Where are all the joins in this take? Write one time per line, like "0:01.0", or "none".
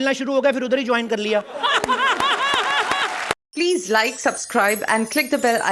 0:03.4